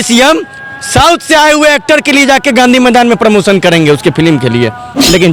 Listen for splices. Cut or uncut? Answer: uncut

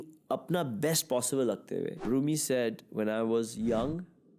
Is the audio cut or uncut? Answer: cut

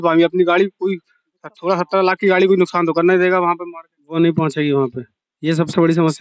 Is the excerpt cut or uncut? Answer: uncut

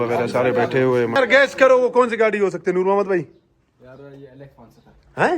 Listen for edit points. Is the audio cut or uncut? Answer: cut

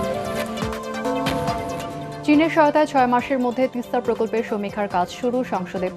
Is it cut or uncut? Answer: cut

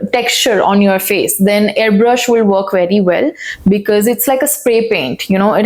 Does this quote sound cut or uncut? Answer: uncut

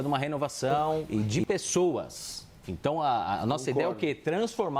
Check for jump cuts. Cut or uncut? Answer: cut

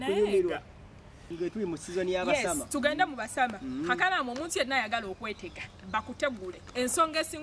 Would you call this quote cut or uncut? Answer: cut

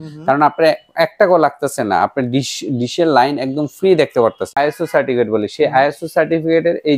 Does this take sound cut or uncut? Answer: cut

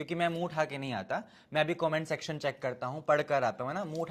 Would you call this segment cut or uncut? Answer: uncut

